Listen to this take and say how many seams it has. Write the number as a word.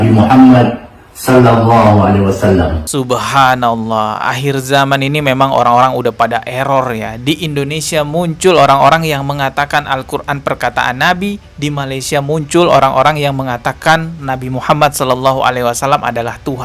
zero